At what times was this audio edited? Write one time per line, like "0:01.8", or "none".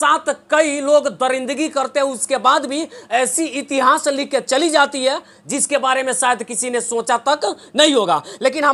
none